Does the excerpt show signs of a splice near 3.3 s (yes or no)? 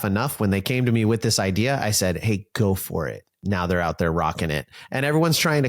yes